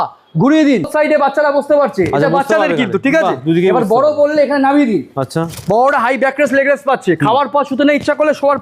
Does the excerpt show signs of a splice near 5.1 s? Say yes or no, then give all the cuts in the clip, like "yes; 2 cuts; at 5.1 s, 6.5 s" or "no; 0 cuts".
no; 1 cut; at 0.9 s